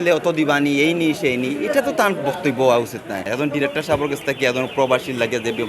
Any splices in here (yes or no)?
yes